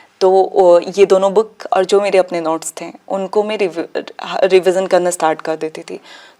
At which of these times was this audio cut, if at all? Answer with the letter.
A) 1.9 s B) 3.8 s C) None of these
C